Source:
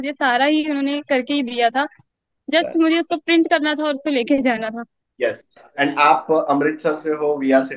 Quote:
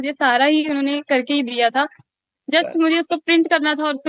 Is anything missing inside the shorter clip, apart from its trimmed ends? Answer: no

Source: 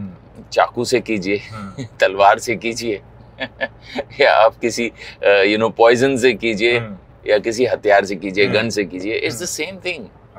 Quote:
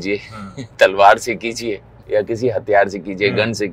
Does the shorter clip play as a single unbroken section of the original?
no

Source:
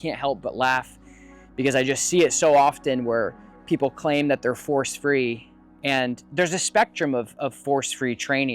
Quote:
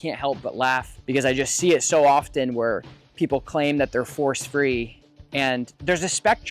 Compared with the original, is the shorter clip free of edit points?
no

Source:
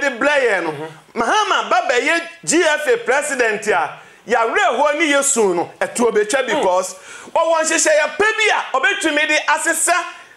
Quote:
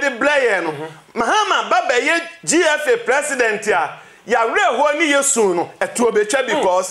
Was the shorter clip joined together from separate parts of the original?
no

